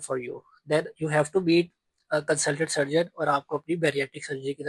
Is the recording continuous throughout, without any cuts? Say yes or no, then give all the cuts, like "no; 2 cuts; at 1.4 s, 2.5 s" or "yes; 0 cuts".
yes; 0 cuts